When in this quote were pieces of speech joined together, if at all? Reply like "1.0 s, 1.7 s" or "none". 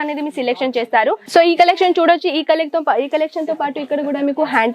1.2 s